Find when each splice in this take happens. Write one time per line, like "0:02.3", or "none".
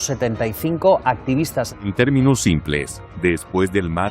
0:01.8